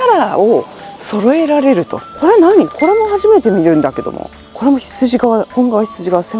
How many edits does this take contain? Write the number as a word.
one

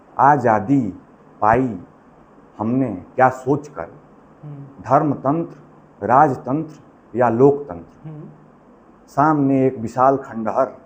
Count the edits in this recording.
zero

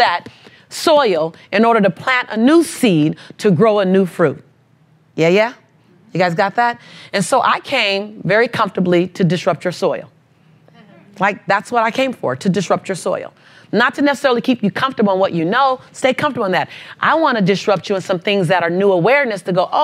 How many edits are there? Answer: zero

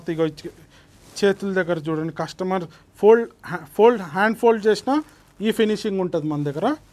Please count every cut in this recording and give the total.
zero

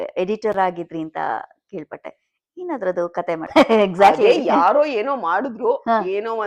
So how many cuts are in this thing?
one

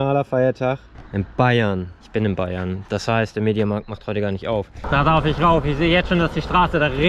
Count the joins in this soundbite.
three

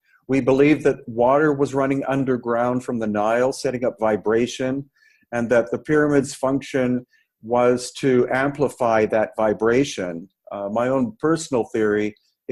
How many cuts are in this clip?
zero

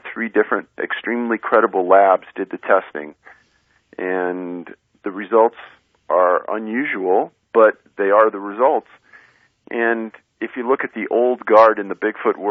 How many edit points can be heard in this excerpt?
zero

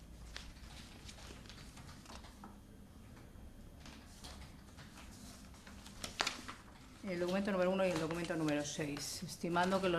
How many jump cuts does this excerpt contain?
one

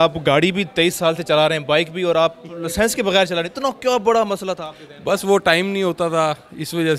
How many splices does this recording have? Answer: zero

